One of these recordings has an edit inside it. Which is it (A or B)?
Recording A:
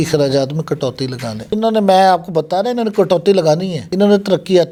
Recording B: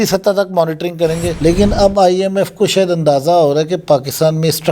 B